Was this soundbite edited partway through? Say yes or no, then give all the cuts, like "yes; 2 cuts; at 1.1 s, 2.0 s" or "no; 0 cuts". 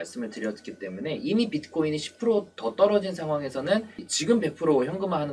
yes; 1 cut; at 4.1 s